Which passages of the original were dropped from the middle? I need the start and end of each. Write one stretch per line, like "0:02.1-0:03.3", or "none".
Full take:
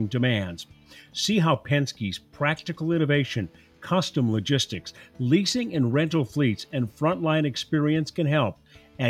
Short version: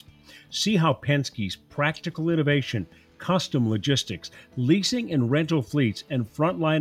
none